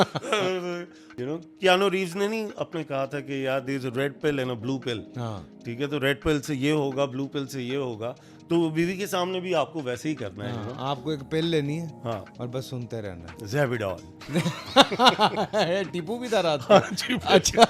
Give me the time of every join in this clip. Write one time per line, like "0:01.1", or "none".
0:01.1

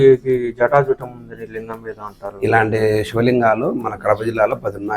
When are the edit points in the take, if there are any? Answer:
none

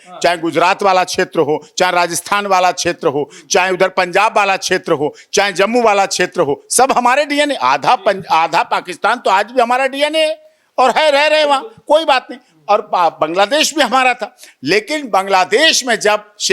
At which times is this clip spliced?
none

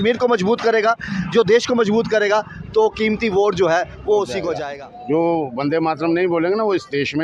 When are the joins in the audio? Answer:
0:04.5

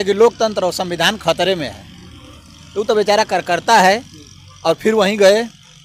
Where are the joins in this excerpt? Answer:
none

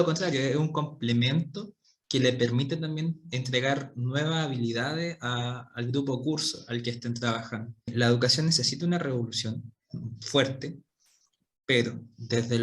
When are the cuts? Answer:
0:07.9

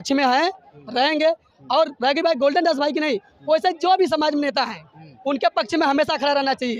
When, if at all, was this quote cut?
none

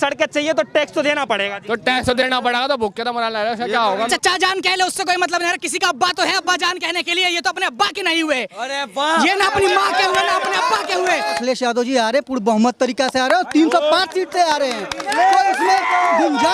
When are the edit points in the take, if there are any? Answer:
0:04.1
0:11.4

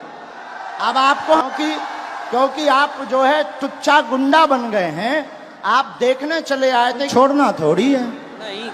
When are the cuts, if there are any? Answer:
0:01.4
0:07.1

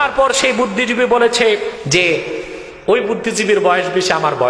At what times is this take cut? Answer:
0:01.8

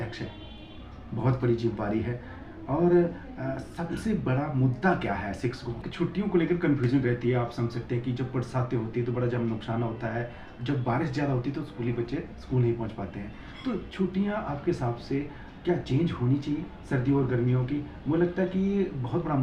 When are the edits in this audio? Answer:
0:05.8

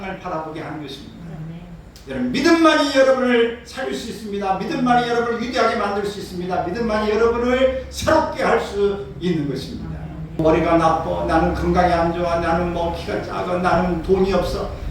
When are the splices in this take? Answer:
0:10.4

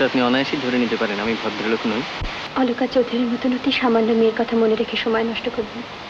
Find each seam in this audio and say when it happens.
0:02.4

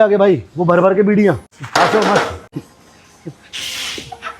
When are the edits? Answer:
0:01.5
0:02.5

